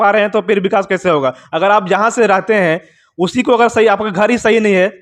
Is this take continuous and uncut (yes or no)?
yes